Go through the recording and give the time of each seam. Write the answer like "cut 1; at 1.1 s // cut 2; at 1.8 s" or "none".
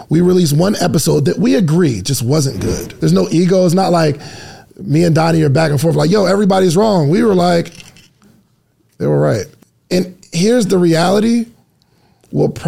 cut 1; at 2.8 s // cut 2; at 9.5 s